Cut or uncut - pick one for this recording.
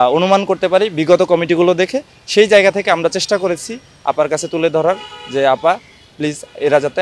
uncut